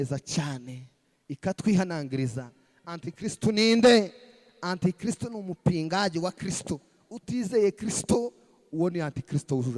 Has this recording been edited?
no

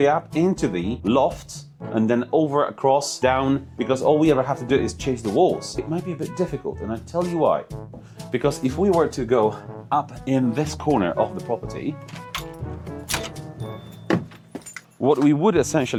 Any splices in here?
no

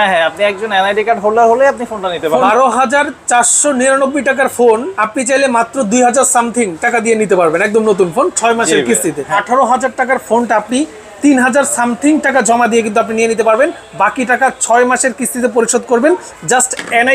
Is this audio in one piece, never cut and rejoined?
no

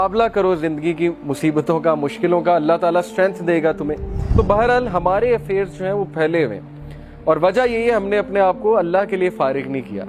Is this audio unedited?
no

